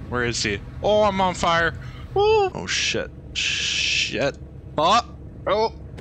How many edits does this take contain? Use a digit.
1